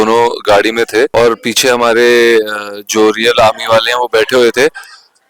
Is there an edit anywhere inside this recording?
yes; 1 cut; at 1.1 s

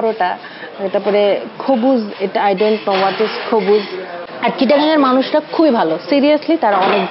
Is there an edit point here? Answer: yes; 1 cut; at 4.2 s

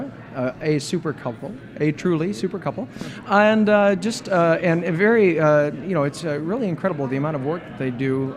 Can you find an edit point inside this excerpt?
no; 0 cuts

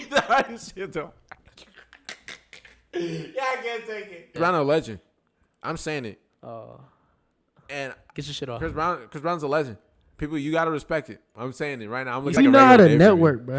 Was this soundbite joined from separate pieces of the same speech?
yes; 2 cuts; at 4.4 s, 12.3 s

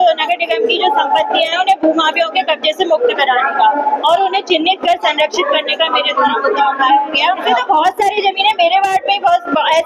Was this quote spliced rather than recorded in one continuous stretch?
yes; 1 cut; at 7.3 s

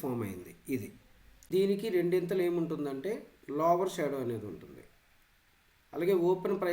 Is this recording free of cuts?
no; 1 cut; at 1.5 s

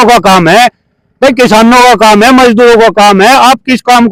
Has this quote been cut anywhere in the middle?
no; 0 cuts

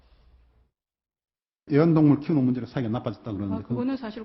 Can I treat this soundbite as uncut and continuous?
yes; 0 cuts

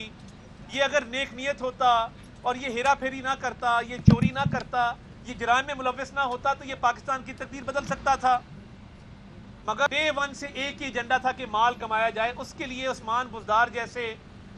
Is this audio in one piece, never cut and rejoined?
no; 1 cut; at 9.9 s

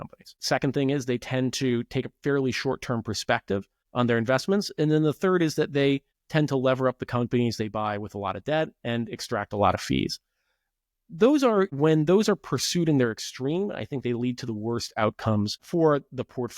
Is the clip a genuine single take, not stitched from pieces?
no; 2 cuts; at 3.8 s, 6.2 s

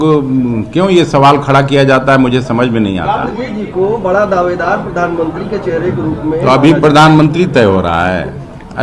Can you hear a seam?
yes; 1 cut; at 3.4 s

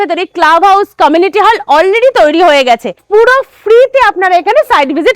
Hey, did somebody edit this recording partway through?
yes; 1 cut; at 3.0 s

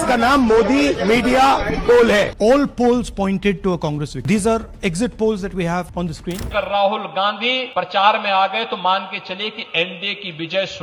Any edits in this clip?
yes; 4 cuts; at 2.3 s, 4.1 s, 6.4 s, 7.6 s

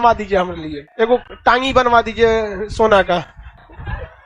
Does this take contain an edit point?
no; 0 cuts

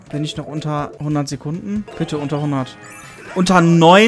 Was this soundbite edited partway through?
yes; 2 cuts; at 1.0 s, 1.9 s

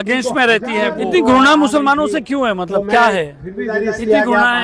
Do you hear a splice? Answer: yes; 2 cuts; at 0.9 s, 3.7 s

